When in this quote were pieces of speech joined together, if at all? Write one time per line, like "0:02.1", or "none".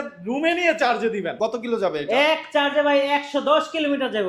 0:01.3